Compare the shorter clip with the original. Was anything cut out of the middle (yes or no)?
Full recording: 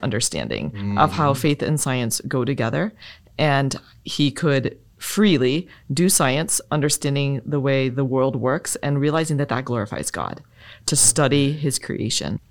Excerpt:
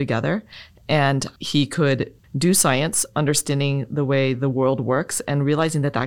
yes